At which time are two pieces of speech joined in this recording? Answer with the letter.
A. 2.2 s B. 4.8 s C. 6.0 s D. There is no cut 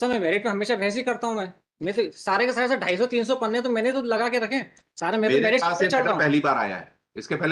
B